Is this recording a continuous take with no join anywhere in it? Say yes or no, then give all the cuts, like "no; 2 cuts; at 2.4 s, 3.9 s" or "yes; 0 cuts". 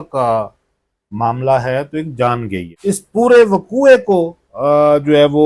no; 1 cut; at 2.7 s